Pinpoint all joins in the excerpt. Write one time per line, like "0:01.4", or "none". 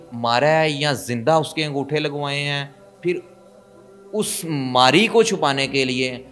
0:02.8